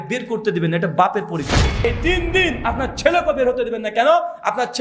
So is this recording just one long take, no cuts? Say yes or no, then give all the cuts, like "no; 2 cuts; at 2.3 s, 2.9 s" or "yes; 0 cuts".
no; 1 cut; at 1.8 s